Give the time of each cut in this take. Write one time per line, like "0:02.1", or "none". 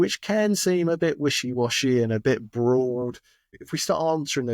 0:03.5